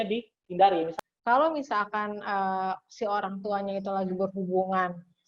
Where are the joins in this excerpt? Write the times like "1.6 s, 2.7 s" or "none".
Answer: 0.9 s